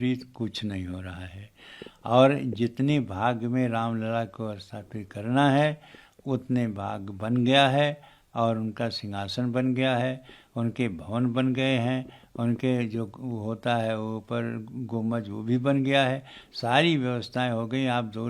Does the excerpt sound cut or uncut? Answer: uncut